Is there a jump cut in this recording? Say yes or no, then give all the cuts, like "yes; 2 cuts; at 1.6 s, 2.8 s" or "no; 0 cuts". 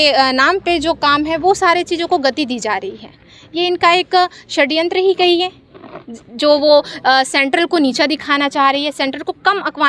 no; 0 cuts